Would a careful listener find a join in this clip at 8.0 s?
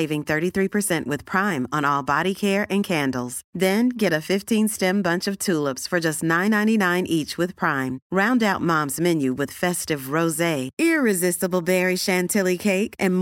no; 0 cuts

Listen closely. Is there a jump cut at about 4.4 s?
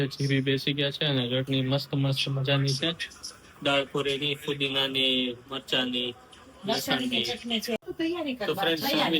no; 1 cut; at 7.8 s

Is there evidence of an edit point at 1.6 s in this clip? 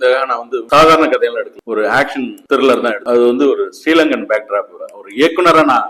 no; 2 cuts; at 3.0 s, 4.7 s

